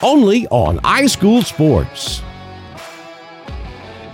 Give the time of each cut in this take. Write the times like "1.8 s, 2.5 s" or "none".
1.9 s